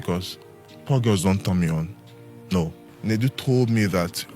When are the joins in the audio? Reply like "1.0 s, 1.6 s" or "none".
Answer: 2.8 s